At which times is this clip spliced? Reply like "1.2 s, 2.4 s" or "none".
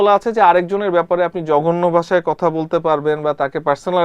none